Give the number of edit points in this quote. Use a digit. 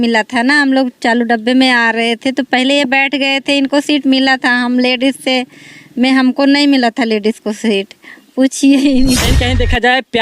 1